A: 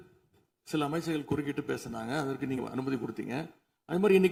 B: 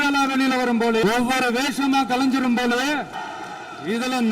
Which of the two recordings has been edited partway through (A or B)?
B